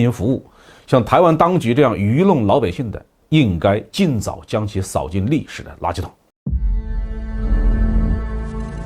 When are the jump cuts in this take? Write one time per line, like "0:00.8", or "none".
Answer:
0:06.3